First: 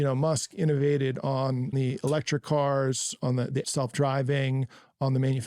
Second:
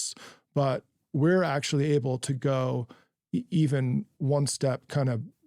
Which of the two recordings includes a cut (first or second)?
first